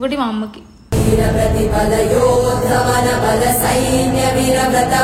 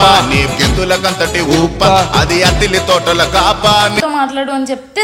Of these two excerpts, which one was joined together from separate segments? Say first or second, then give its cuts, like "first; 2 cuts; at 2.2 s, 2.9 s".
second; 1 cut; at 4.0 s